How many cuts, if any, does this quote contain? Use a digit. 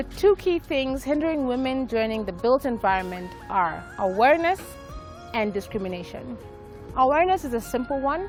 0